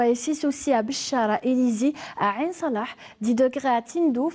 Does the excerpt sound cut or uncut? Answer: uncut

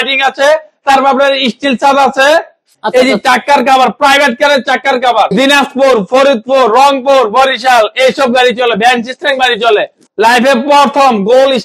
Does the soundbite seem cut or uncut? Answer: cut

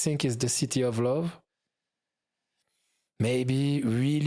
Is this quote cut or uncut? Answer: uncut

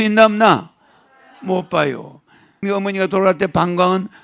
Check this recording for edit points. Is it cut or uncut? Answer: cut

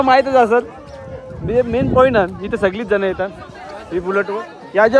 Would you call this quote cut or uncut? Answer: uncut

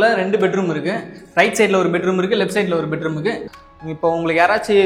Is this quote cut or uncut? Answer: cut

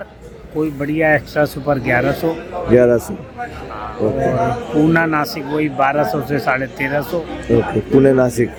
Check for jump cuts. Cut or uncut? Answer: uncut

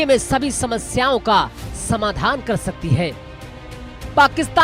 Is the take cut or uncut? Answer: uncut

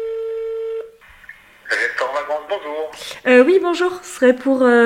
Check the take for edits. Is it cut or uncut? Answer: cut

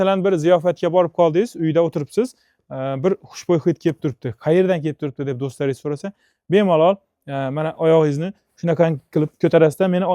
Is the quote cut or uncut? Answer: uncut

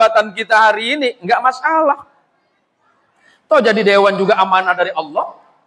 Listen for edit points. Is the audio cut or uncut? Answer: uncut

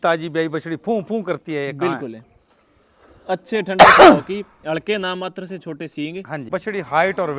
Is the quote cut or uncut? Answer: cut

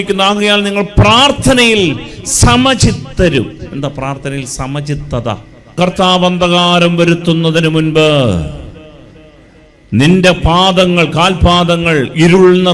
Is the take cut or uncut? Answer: cut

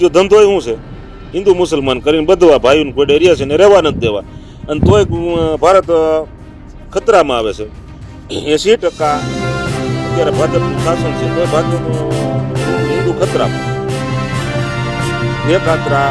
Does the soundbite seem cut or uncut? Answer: uncut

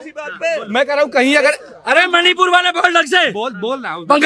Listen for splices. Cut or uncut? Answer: uncut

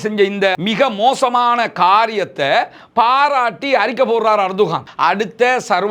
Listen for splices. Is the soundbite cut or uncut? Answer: cut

